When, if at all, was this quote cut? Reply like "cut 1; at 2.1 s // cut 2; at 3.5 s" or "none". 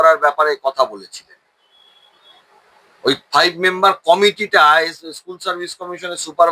none